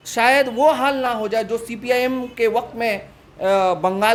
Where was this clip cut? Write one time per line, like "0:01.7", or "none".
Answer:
none